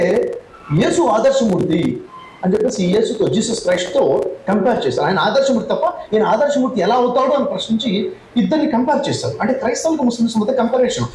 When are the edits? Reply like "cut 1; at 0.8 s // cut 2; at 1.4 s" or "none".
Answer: none